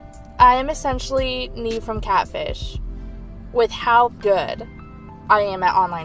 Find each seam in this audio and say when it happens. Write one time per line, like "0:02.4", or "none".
0:04.2